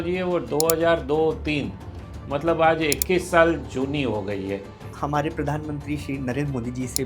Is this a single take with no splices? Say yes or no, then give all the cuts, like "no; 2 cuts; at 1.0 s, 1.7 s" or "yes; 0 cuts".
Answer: no; 1 cut; at 4.9 s